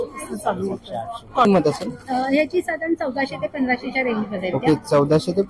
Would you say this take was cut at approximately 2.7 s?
no; 1 cut; at 1.5 s

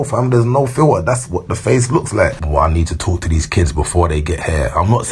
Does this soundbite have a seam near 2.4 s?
yes; 1 cut; at 2.4 s

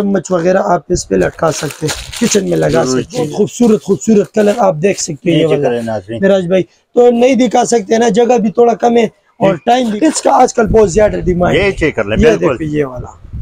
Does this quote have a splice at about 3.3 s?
yes; 2 cuts; at 3.3 s, 9.9 s

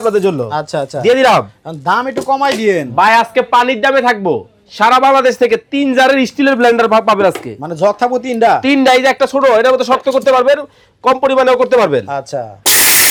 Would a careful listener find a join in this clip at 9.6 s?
no; 0 cuts

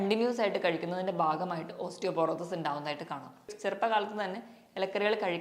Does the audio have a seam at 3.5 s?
yes; 1 cut; at 3.5 s

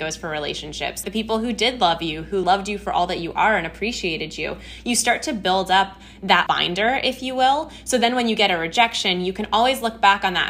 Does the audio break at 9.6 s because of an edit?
no; 3 cuts; at 1.0 s, 2.4 s, 6.4 s

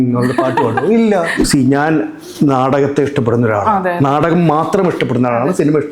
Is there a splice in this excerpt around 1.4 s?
yes; 1 cut; at 1.4 s

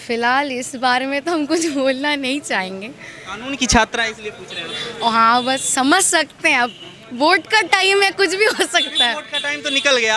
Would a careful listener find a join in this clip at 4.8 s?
no; 0 cuts

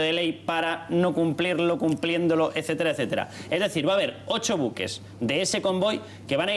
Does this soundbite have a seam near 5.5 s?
yes; 1 cut; at 5.5 s

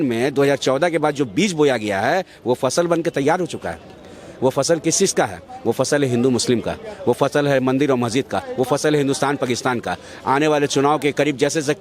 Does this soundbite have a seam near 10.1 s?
no; 0 cuts

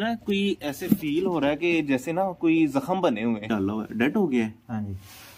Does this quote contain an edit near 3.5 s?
yes; 1 cut; at 3.5 s

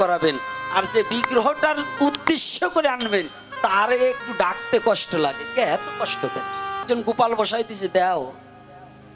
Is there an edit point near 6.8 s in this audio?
yes; 1 cut; at 6.8 s

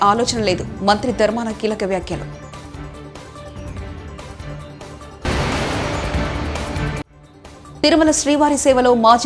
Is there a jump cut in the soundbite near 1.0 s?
no; 0 cuts

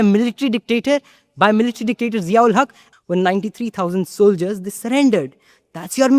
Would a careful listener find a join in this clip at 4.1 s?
no; 1 cut; at 2.8 s

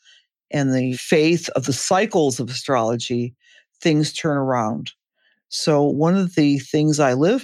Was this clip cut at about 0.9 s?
yes; 1 cut; at 0.9 s

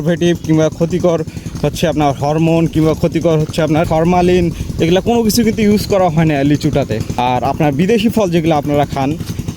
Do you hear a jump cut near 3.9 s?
yes; 2 cuts; at 3.9 s, 7.1 s

